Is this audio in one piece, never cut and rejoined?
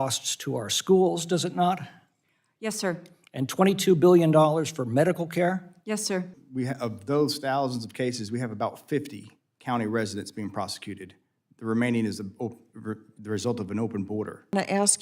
no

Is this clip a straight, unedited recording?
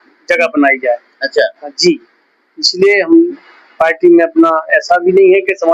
yes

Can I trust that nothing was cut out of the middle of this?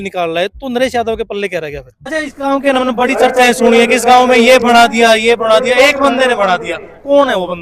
no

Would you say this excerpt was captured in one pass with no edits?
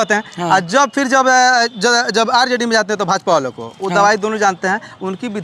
yes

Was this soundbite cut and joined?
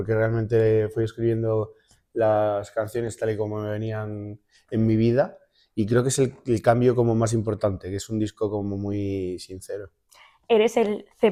no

